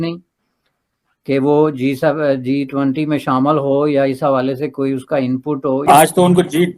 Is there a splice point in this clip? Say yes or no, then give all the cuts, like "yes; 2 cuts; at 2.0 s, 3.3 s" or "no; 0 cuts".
yes; 1 cut; at 5.8 s